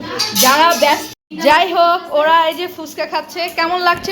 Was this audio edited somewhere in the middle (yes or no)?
yes